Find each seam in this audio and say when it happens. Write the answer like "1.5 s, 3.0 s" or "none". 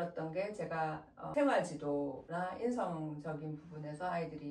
1.2 s, 2.2 s